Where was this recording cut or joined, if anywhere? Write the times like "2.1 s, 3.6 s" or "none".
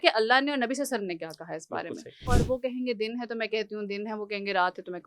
2.3 s